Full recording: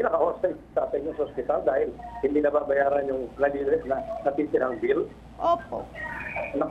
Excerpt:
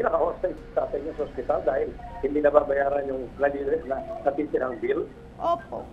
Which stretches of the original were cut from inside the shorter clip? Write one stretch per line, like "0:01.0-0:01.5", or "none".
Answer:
none